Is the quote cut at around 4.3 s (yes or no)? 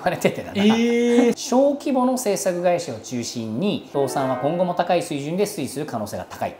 no